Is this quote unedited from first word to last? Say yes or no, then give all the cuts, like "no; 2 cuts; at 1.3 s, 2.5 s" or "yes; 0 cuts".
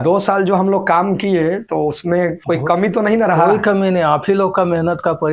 no; 1 cut; at 1.8 s